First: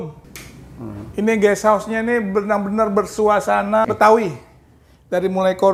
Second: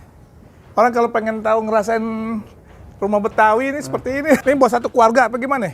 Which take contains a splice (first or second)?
second